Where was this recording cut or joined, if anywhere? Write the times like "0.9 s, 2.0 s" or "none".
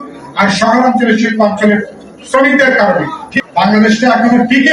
3.3 s